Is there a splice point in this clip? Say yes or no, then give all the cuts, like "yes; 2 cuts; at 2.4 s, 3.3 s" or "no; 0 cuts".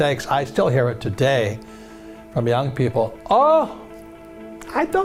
no; 0 cuts